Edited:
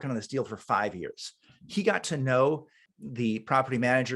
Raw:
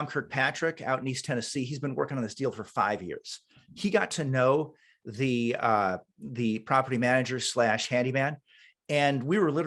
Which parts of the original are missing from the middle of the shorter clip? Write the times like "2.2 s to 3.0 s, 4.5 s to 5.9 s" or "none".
5.0 s to 6.1 s